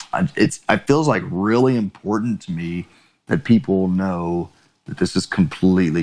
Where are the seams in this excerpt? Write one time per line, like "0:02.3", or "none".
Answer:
none